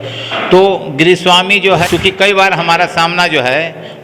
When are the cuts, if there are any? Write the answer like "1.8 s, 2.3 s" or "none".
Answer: 1.9 s